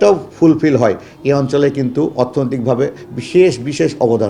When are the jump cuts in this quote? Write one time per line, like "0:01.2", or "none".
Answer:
none